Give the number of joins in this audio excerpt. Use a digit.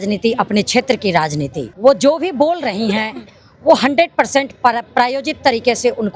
1